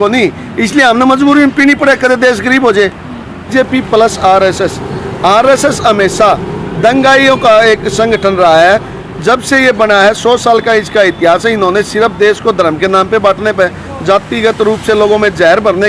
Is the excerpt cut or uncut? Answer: cut